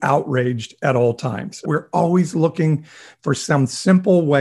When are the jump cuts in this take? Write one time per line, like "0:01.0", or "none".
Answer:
0:01.6